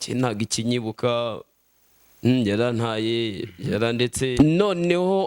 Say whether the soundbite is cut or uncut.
cut